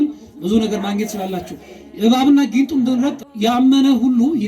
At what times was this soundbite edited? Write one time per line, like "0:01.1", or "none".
0:03.2